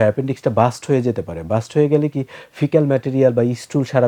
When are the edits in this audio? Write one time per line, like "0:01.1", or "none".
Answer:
none